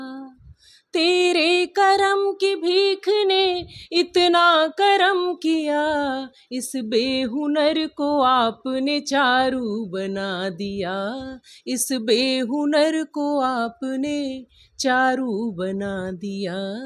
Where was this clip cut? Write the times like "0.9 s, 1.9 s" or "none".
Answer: none